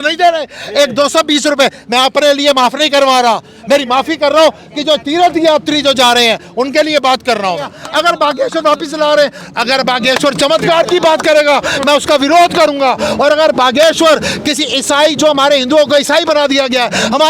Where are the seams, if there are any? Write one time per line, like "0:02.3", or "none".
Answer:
0:07.8

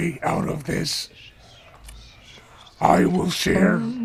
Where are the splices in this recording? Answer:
none

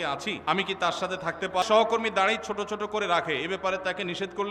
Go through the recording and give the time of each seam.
0:01.6

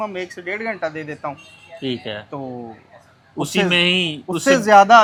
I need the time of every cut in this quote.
none

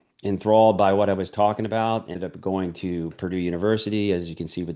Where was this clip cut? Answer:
0:02.2

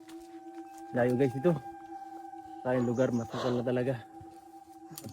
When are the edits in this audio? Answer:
0:00.9

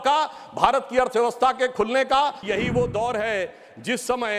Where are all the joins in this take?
0:02.4

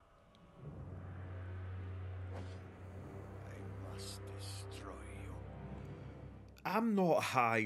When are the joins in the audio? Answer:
none

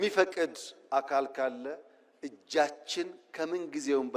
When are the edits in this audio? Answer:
none

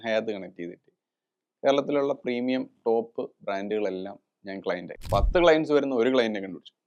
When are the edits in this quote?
0:04.9

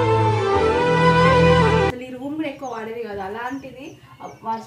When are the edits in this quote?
0:02.0

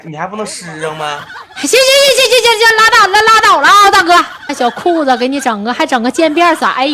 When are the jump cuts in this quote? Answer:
0:04.5

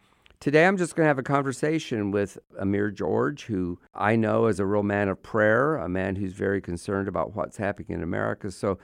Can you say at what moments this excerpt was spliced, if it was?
0:02.5
0:03.8

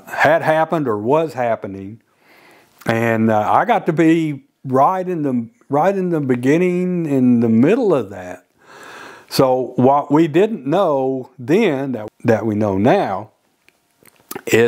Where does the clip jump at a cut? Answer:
0:12.0

